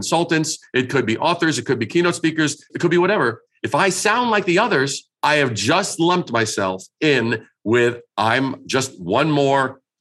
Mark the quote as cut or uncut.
cut